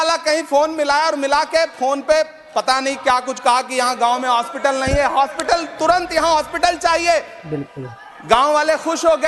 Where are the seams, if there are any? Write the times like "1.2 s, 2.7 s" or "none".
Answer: none